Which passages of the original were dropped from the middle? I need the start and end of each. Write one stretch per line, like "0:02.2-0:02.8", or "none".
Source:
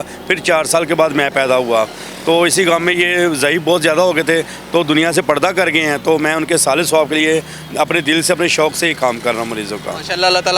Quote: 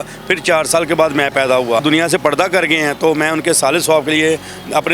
0:01.8-0:04.8